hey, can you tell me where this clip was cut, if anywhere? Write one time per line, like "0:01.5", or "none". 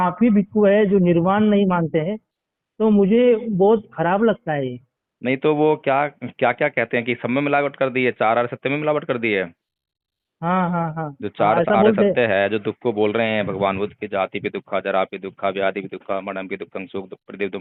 none

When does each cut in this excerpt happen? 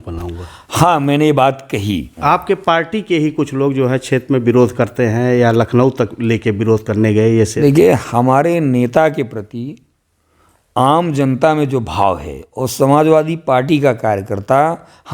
0:02.1
0:07.5

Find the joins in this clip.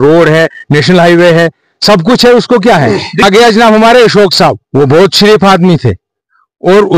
0:03.2

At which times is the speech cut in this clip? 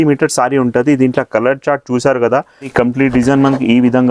0:02.7

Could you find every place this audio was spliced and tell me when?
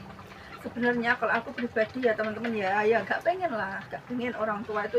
none

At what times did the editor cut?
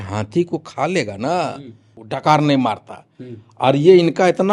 0:02.2

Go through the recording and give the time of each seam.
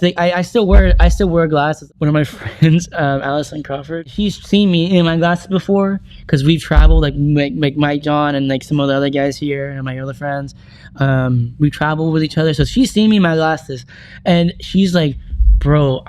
0:01.8
0:04.1

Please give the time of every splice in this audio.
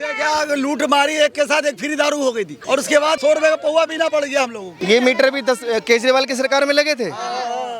0:02.5
0:04.7

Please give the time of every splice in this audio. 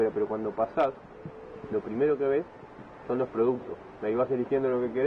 none

